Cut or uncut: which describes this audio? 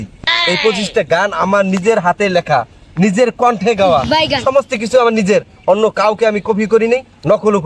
uncut